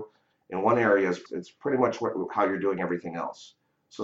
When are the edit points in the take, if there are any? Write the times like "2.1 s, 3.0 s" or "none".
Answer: 1.2 s